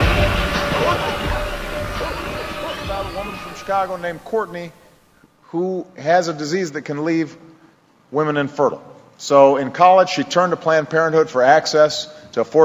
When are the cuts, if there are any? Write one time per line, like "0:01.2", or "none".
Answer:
none